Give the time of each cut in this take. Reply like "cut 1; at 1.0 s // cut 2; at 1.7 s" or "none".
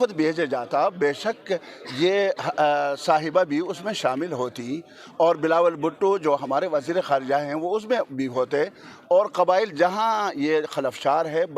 none

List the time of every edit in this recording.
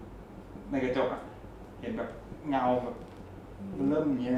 none

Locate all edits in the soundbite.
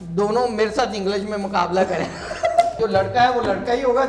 cut 1; at 2.8 s

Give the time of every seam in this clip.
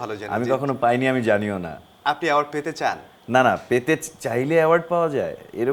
none

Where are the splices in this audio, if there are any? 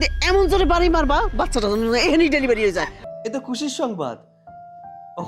cut 1; at 3.0 s

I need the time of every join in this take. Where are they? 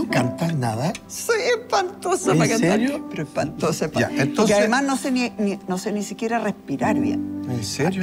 none

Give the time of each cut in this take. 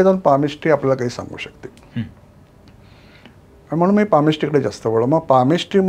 none

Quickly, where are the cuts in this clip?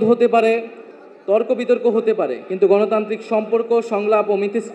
none

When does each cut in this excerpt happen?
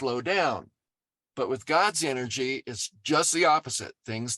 none

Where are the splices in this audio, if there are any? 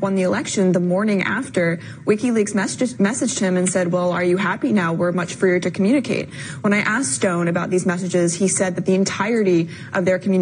cut 1; at 1.9 s

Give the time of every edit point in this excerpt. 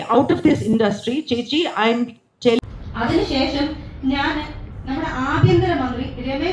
cut 1; at 2.6 s

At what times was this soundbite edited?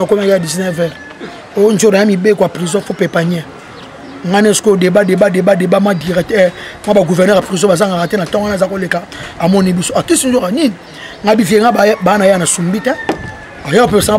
none

